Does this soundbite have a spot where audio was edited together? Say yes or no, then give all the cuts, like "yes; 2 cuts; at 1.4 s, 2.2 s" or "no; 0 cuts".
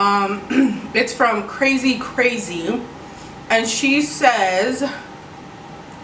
no; 0 cuts